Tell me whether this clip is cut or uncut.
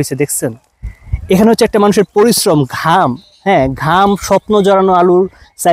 uncut